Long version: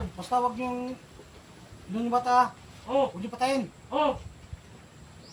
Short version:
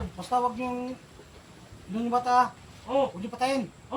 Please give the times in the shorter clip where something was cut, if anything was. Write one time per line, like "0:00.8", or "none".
none